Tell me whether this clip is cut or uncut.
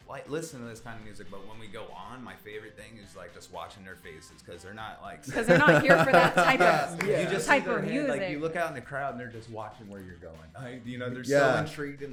uncut